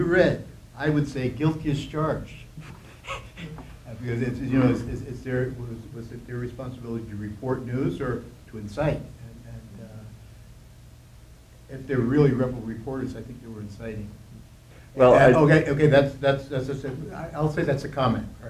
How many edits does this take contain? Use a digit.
1